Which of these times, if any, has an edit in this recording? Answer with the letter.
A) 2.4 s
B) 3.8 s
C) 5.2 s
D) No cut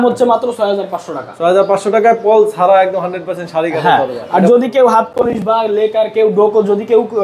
D